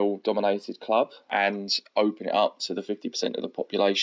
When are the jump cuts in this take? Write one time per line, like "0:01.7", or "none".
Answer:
0:01.3